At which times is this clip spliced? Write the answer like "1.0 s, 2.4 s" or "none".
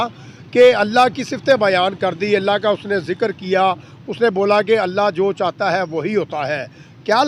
none